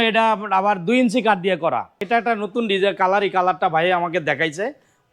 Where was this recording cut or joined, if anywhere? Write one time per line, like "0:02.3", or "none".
0:02.0